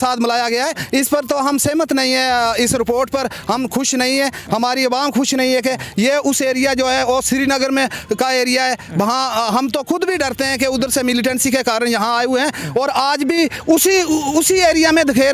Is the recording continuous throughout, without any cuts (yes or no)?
yes